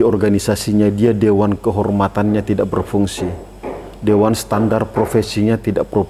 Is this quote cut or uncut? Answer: uncut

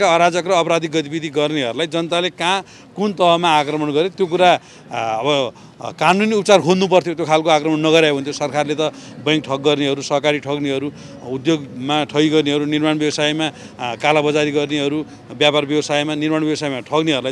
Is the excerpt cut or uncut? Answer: uncut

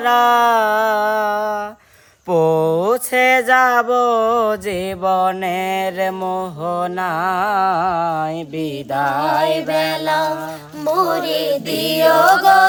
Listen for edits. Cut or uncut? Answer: uncut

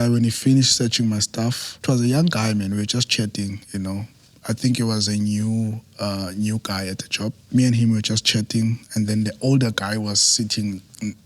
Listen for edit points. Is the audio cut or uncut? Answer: cut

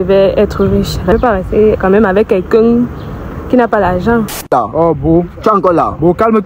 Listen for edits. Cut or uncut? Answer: cut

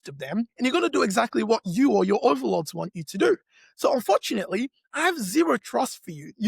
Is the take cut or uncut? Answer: uncut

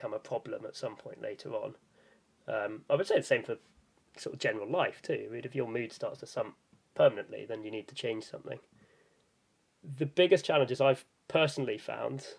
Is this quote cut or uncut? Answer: uncut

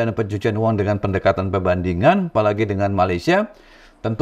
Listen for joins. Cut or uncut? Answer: uncut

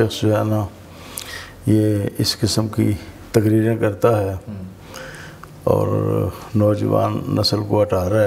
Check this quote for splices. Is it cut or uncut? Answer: uncut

